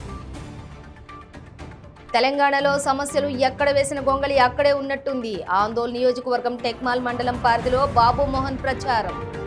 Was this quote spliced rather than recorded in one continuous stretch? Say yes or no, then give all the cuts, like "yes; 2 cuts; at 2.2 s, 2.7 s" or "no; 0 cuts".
yes; 1 cut; at 1.5 s